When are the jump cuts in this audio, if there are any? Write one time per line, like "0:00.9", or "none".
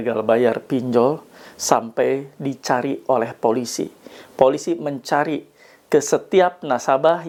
none